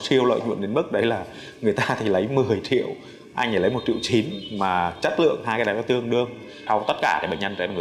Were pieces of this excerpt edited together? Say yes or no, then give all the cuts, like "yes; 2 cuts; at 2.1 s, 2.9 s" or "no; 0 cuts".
yes; 1 cut; at 6.6 s